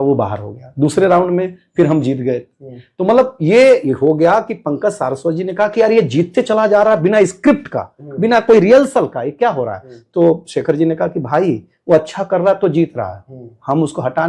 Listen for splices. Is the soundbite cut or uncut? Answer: uncut